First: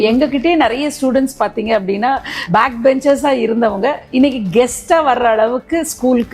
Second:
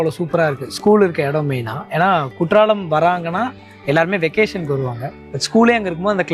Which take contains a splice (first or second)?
first